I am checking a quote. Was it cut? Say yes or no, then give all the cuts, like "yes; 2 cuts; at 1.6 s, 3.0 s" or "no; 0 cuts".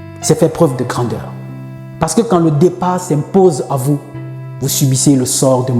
no; 0 cuts